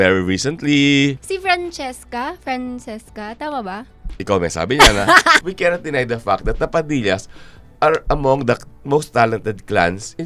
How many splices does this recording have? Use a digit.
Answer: 2